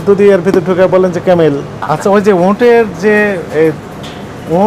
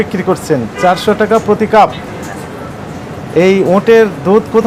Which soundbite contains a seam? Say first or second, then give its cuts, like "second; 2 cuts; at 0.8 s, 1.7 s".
first; 1 cut; at 1.7 s